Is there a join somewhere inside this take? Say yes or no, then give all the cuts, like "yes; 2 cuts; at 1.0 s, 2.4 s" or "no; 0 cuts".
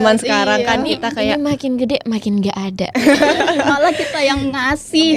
no; 0 cuts